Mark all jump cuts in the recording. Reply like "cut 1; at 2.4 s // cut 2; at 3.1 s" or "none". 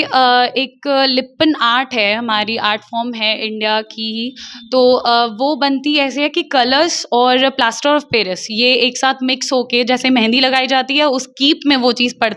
none

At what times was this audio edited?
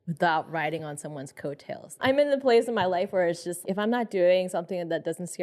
cut 1; at 2.0 s // cut 2; at 3.6 s

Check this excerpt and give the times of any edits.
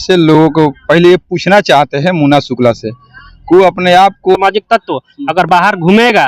cut 1; at 4.4 s

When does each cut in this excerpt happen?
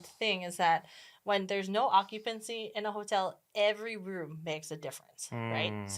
none

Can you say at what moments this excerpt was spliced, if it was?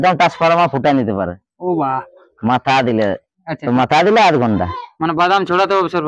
cut 1; at 3.5 s

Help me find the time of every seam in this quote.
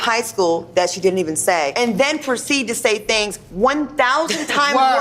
cut 1; at 1.7 s

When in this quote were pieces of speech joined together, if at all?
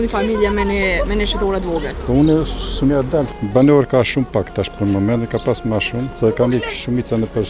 cut 1; at 1.9 s // cut 2; at 3.3 s // cut 3; at 6.1 s

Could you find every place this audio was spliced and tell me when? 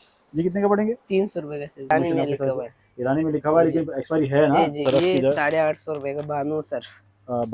cut 1; at 1.9 s // cut 2; at 4.8 s

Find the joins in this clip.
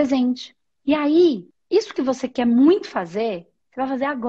cut 1; at 1.5 s

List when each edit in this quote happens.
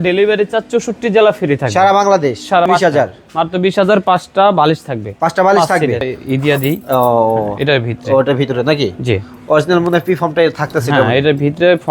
cut 1; at 2.7 s // cut 2; at 6.1 s

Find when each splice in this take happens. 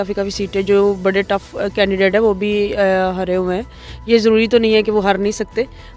none

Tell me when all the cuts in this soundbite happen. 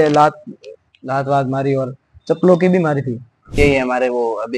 cut 1; at 3.5 s

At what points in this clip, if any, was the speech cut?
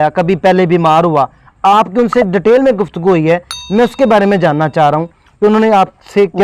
none

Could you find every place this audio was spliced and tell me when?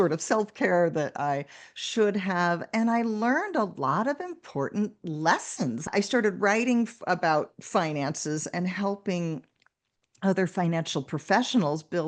cut 1; at 5.9 s

